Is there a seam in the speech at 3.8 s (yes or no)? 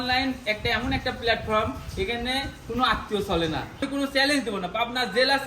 yes